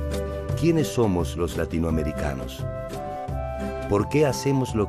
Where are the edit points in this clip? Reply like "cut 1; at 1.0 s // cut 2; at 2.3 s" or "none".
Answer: cut 1; at 2.1 s